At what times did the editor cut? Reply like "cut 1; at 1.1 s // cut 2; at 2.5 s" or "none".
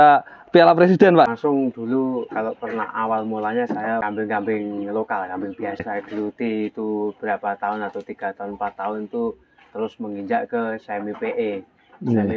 cut 1; at 1.3 s // cut 2; at 4.0 s // cut 3; at 5.9 s